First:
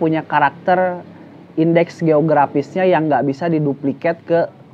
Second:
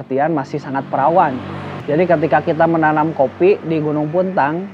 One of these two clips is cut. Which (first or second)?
second